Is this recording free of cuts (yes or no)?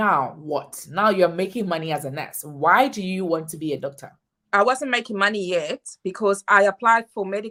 yes